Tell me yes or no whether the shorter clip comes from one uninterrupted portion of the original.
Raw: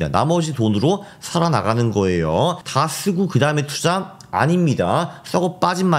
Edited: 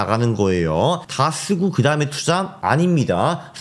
no